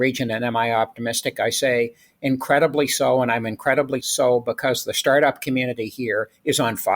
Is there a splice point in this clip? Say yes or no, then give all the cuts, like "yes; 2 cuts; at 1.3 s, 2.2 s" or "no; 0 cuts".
no; 0 cuts